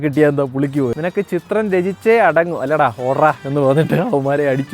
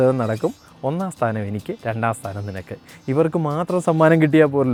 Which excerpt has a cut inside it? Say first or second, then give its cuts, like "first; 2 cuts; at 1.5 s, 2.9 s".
first; 1 cut; at 0.9 s